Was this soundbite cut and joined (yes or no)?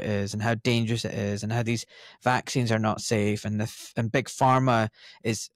no